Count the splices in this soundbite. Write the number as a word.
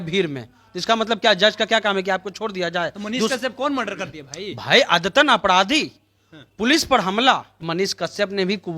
one